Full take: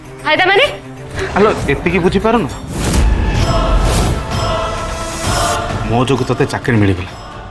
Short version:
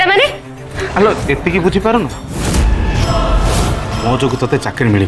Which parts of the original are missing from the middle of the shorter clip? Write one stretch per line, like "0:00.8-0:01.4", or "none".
0:04.3-0:05.8